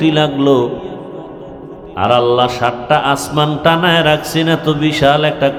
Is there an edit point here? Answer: no; 0 cuts

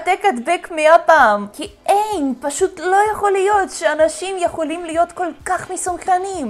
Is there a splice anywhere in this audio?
no; 0 cuts

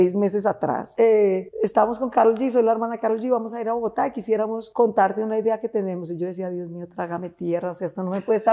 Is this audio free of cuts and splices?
no; 3 cuts; at 0.8 s, 1.5 s, 4.6 s

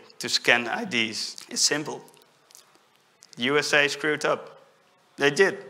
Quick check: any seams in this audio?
yes; 1 cut; at 1.3 s

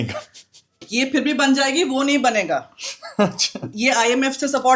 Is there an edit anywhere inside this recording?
no; 0 cuts

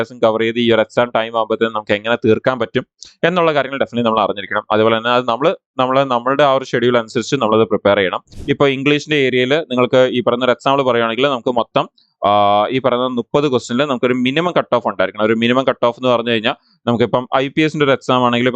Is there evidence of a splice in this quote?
yes; 1 cut; at 8.3 s

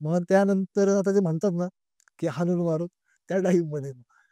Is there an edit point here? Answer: no; 0 cuts

